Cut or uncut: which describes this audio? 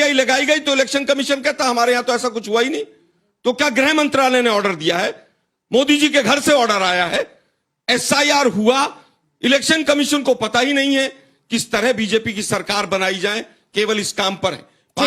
uncut